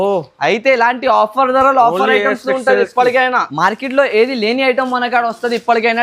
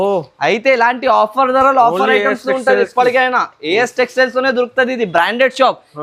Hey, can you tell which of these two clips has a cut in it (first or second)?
first